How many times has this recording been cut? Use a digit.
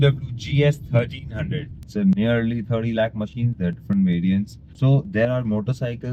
2